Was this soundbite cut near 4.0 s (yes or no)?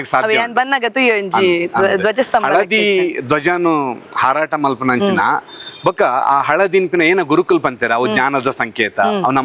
no